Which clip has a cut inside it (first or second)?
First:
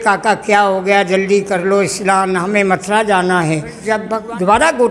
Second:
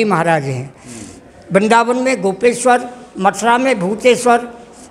first